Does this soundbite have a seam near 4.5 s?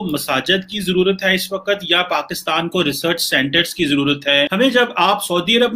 yes; 1 cut; at 4.5 s

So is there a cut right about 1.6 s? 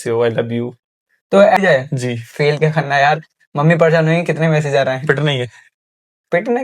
yes; 1 cut; at 1.6 s

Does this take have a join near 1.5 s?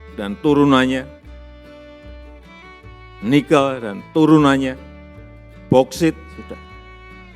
yes; 2 cuts; at 1.5 s, 3.2 s

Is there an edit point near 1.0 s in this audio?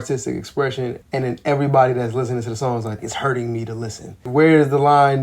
yes; 3 cuts; at 1.0 s, 3.0 s, 4.2 s

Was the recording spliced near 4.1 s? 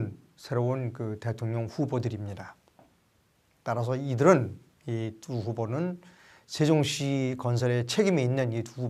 no; 0 cuts

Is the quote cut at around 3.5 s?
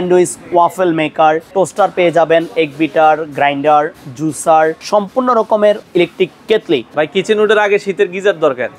no; 4 cuts; at 1.4 s, 4.8 s, 5.8 s, 6.9 s

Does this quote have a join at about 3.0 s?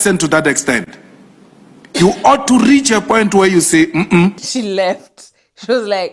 no; 1 cut; at 4.5 s

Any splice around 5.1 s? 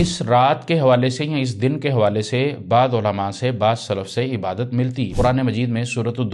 yes; 1 cut; at 5.1 s

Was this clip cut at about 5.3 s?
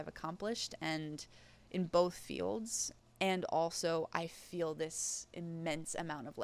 no; 1 cut; at 2.8 s

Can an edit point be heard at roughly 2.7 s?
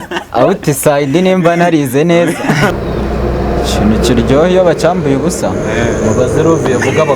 yes; 1 cut; at 2.7 s

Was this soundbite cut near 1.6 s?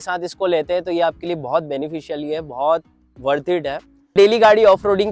no; 1 cut; at 4.1 s

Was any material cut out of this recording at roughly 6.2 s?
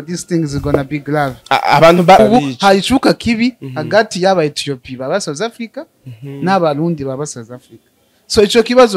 no; 1 cut; at 2.2 s

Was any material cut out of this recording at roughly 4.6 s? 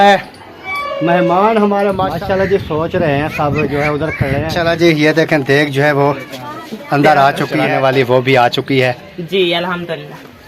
yes; 3 cuts; at 2.1 s, 4.6 s, 7.7 s

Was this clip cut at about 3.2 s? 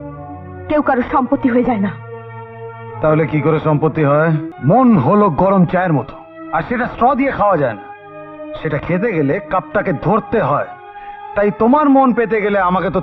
no; 1 cut; at 4.5 s

